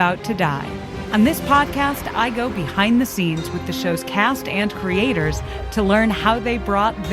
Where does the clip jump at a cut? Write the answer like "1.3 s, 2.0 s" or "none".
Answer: 1.0 s